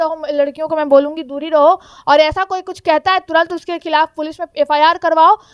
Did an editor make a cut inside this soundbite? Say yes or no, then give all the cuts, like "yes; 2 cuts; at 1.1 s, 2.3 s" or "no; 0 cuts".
no; 0 cuts